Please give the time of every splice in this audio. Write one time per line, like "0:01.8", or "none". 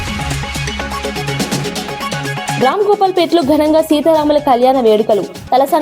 0:02.6